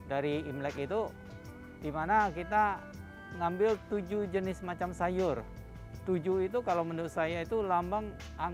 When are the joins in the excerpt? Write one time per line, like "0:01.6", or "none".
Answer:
none